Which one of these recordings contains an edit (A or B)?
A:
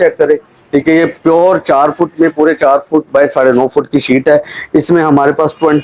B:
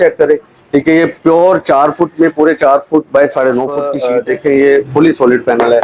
B